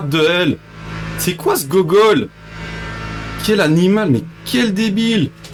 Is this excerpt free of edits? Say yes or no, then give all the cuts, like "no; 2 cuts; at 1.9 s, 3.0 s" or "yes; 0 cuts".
yes; 0 cuts